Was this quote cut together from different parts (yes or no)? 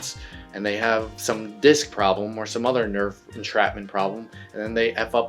yes